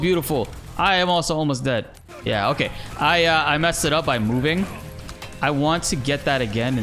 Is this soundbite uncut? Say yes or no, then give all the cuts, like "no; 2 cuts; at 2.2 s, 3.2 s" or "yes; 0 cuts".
no; 1 cut; at 2.0 s